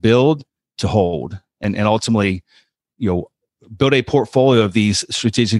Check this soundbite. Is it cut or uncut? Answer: cut